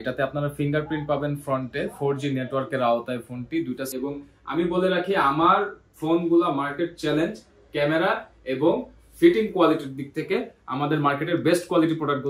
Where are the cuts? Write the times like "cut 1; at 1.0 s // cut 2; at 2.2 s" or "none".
cut 1; at 3.9 s